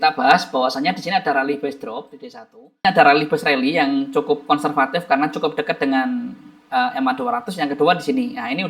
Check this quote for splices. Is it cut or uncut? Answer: cut